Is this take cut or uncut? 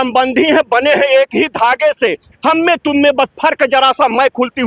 uncut